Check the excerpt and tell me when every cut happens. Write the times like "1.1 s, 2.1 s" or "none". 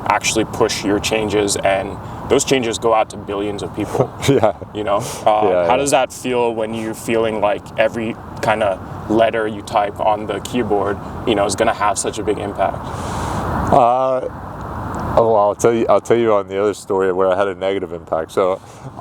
none